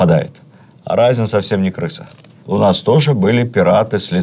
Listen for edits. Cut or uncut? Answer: cut